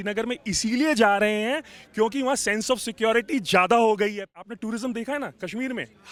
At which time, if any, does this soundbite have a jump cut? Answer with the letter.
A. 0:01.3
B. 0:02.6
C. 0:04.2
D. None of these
D